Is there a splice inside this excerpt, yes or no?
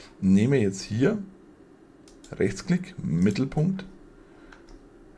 no